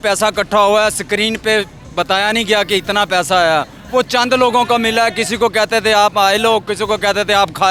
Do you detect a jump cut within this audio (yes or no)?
no